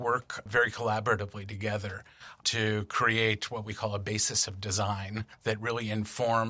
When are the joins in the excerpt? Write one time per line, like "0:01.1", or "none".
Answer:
0:05.3